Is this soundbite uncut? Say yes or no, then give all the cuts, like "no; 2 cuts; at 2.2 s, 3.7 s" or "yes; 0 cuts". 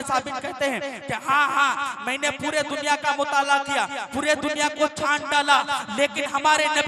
yes; 0 cuts